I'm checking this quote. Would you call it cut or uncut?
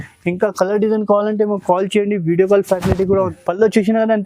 cut